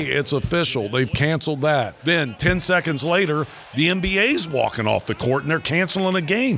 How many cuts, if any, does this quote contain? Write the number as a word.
one